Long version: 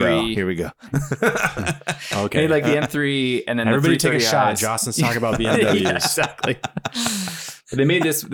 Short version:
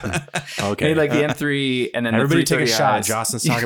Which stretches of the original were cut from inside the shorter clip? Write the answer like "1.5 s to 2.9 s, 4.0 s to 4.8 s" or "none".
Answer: none